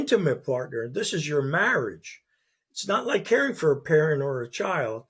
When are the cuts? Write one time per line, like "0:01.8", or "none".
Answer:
none